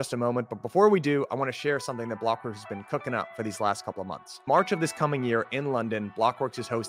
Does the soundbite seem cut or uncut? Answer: uncut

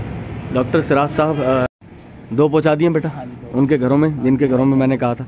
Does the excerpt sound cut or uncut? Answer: cut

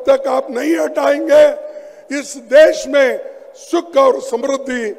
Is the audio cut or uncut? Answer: uncut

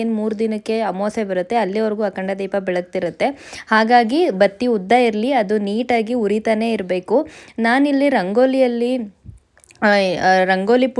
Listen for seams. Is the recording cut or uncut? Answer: uncut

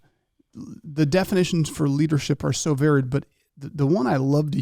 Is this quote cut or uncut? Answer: uncut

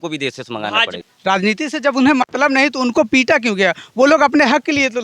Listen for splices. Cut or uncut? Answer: cut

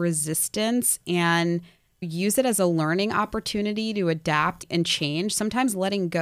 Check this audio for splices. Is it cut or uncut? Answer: cut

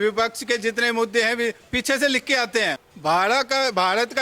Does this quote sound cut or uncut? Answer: cut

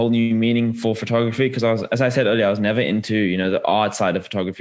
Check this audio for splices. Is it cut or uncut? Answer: uncut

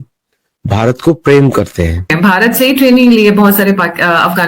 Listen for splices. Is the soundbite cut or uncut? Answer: cut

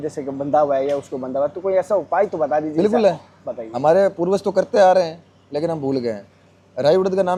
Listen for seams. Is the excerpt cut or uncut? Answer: uncut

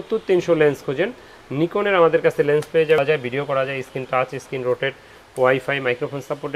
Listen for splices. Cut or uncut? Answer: cut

